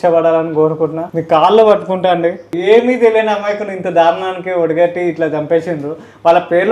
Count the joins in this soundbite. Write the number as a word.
two